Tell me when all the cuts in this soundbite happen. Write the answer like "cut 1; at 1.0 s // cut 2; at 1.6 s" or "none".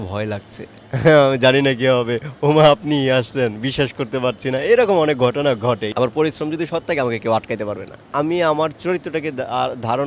cut 1; at 5.9 s // cut 2; at 8.0 s

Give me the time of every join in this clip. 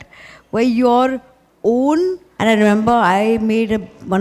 cut 1; at 2.3 s

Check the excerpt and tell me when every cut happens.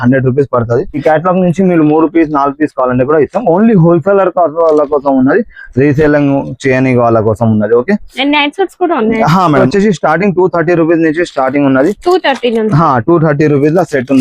cut 1; at 0.9 s // cut 2; at 9.6 s

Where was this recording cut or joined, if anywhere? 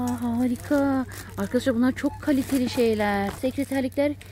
cut 1; at 3.4 s

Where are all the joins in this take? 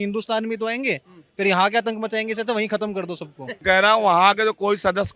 cut 1; at 3.6 s

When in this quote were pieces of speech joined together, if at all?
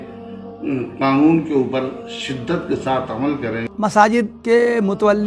cut 1; at 3.7 s // cut 2; at 4.4 s

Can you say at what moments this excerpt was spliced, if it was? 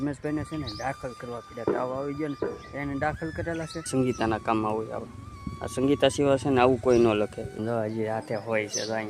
cut 1; at 3.9 s // cut 2; at 7.4 s

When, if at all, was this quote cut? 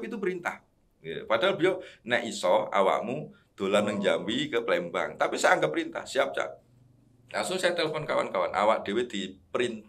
none

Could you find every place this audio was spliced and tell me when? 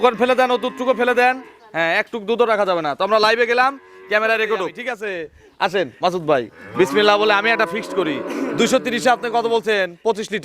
cut 1; at 4.9 s

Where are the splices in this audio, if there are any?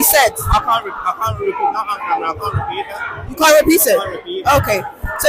none

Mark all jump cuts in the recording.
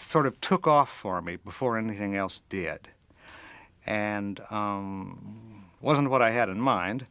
cut 1; at 1.6 s

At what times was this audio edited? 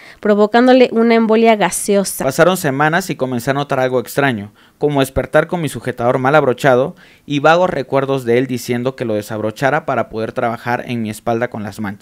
cut 1; at 2.1 s

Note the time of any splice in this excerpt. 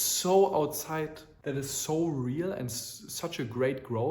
cut 1; at 1.3 s

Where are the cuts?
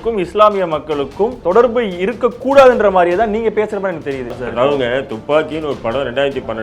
cut 1; at 1.4 s // cut 2; at 4.4 s

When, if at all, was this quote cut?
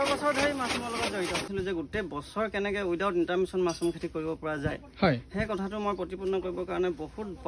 cut 1; at 1.5 s

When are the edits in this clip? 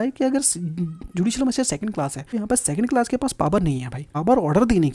cut 1; at 2.2 s // cut 2; at 4.0 s

